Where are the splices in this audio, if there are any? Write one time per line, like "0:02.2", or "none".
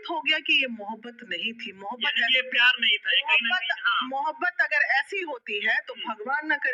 none